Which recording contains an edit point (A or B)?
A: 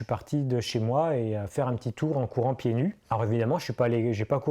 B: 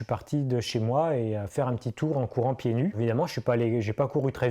B